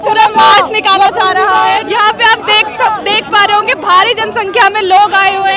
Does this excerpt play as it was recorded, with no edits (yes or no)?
yes